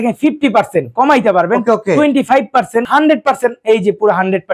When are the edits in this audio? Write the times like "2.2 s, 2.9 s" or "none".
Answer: 2.9 s